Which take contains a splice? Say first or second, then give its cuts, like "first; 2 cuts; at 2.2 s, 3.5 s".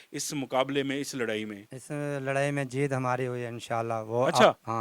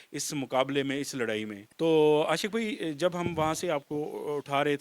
second; 1 cut; at 1.6 s